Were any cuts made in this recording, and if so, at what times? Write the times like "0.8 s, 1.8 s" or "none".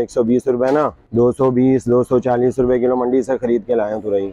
1.0 s